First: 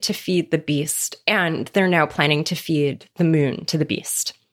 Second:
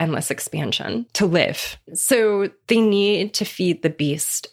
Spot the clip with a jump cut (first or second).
second